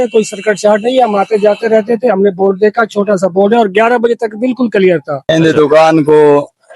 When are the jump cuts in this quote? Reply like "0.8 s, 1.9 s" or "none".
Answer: 5.1 s